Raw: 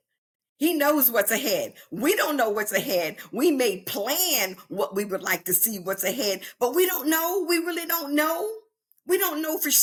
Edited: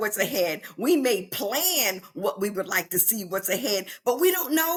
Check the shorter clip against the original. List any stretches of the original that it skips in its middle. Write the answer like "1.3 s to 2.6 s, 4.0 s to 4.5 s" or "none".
none